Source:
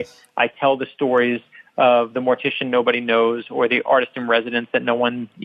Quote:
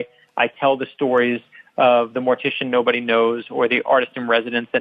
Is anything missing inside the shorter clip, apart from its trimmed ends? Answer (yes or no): no